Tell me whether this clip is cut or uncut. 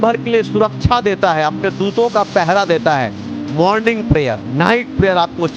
cut